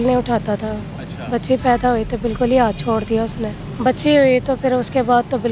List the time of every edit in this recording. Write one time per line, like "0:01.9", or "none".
0:03.5